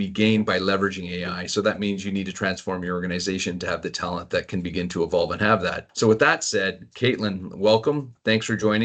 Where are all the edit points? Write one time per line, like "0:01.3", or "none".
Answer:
none